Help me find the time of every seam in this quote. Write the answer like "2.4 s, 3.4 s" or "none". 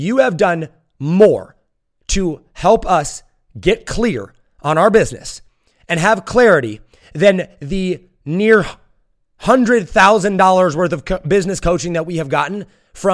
none